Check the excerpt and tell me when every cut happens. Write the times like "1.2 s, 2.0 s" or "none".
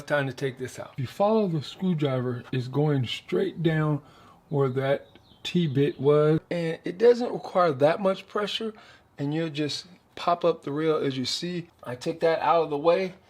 1.0 s, 6.5 s, 11.9 s